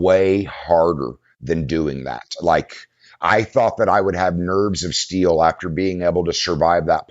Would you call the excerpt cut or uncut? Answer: cut